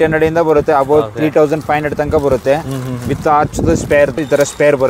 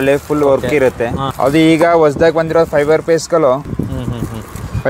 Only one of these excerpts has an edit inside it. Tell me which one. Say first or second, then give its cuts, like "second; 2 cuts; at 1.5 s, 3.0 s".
second; 2 cuts; at 1.2 s, 3.7 s